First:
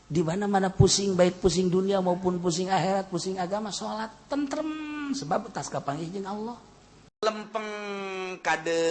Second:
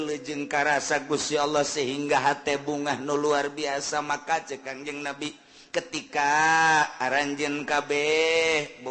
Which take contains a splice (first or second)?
first